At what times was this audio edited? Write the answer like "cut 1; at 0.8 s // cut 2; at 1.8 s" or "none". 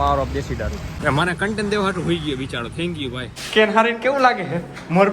cut 1; at 0.9 s // cut 2; at 3.4 s

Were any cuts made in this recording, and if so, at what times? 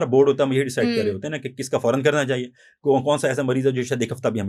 none

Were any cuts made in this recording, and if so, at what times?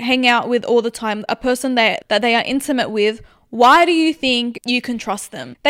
cut 1; at 4.6 s

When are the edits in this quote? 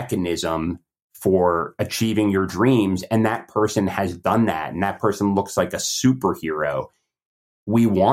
none

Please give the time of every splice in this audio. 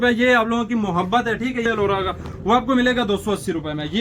cut 1; at 1.6 s

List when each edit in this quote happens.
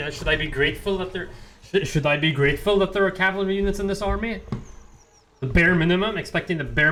none

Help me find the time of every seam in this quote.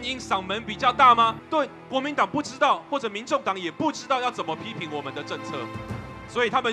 cut 1; at 1.4 s

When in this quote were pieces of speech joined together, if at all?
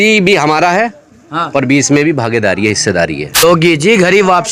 cut 1; at 3.4 s

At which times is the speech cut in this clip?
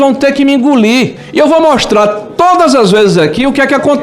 cut 1; at 1.2 s

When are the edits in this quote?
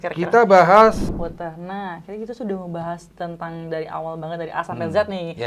cut 1; at 1.0 s

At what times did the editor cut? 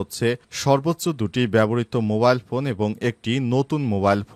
none

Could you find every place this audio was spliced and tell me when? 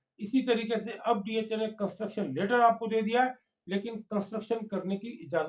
none

